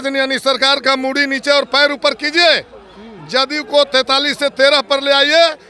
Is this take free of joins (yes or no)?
yes